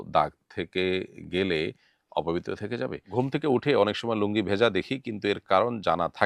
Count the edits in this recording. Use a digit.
1